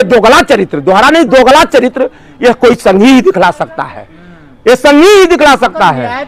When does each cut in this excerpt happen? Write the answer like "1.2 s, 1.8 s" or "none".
none